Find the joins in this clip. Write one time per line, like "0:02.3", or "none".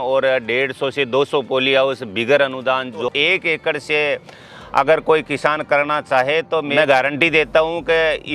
0:03.1
0:06.7